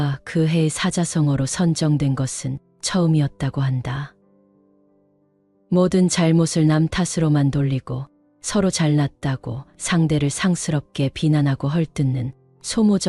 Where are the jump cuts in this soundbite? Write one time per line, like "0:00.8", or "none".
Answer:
none